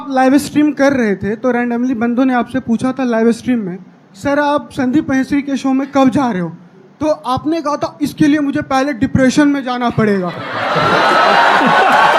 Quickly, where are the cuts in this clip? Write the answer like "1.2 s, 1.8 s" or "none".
none